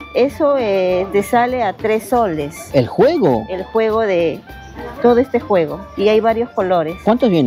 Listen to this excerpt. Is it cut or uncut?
uncut